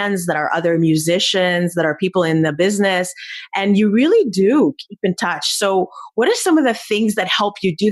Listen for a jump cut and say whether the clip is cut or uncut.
uncut